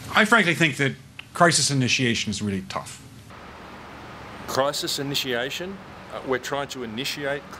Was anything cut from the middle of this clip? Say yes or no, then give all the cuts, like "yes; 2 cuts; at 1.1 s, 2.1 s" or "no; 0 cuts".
no; 0 cuts